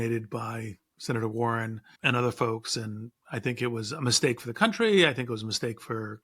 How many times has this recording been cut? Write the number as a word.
one